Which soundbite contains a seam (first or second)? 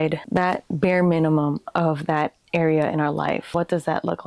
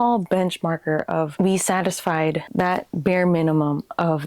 second